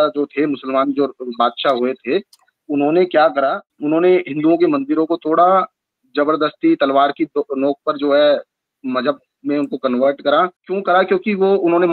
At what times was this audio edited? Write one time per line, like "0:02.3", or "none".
0:03.7
0:10.7